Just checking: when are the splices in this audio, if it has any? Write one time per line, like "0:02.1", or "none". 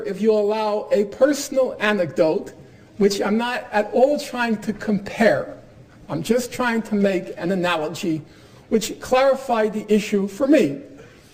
0:03.9